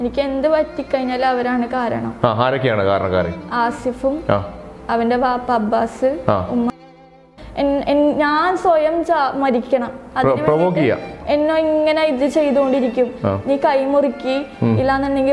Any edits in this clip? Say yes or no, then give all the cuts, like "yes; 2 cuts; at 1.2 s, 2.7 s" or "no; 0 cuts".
yes; 1 cut; at 7.3 s